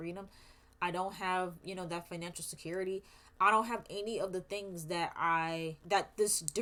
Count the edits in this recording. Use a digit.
0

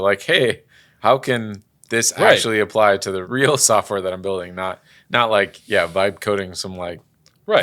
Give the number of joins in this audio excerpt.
1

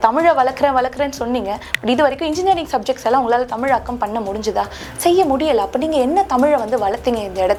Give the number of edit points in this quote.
0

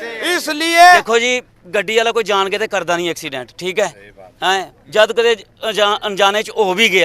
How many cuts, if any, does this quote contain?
1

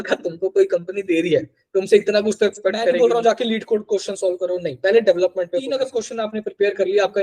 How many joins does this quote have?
2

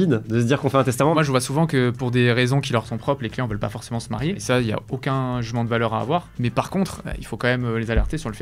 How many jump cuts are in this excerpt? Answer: 2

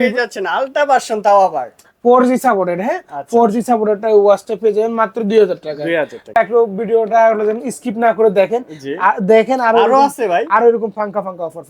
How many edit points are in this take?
1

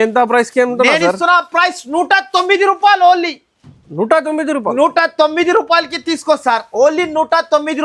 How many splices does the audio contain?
0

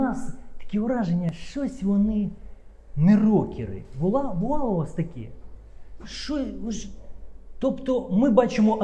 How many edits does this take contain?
0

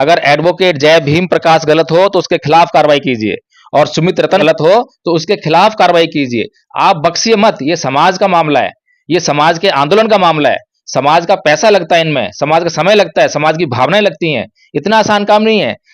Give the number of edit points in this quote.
1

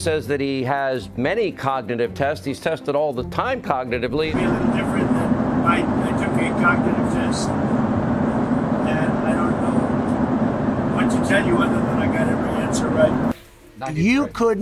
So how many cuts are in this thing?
2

